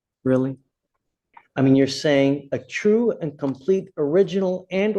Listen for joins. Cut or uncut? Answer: cut